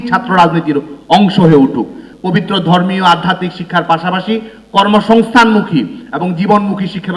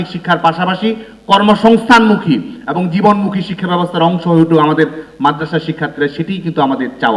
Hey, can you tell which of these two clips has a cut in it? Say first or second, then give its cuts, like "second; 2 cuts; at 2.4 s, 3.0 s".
first; 1 cut; at 2.1 s